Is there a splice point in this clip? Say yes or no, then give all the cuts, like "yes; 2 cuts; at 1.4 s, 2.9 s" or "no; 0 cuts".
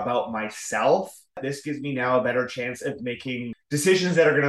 yes; 2 cuts; at 1.5 s, 3.5 s